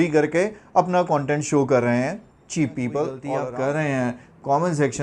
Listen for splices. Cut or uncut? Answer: cut